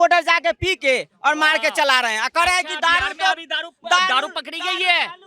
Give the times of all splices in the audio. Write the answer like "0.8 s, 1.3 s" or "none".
none